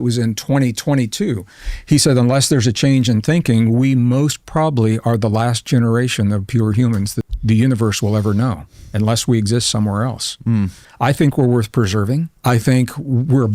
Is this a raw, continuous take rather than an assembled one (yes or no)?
no